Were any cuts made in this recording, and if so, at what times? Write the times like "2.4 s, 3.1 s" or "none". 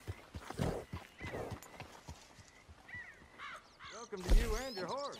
4.0 s